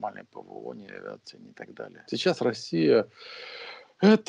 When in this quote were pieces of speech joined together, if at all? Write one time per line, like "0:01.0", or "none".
0:02.0